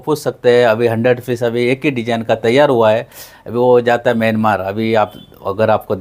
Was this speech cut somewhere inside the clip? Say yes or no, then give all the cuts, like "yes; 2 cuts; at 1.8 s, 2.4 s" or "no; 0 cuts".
no; 0 cuts